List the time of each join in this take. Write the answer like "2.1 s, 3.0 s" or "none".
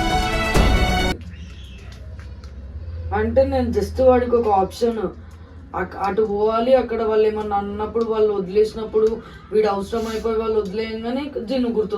none

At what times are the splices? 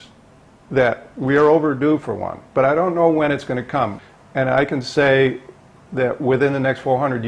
4.0 s

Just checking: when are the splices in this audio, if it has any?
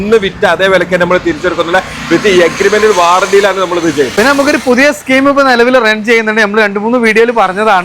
none

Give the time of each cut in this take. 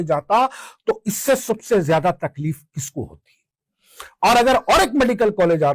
none

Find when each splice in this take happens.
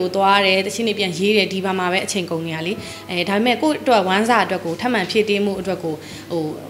none

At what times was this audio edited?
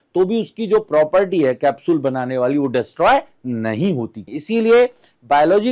4.2 s

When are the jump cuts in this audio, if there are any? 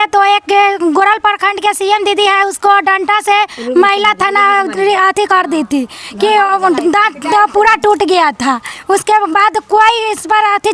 none

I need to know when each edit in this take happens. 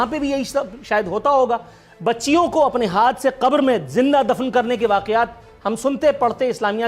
none

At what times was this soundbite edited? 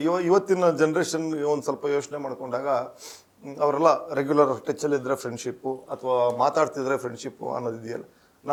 none

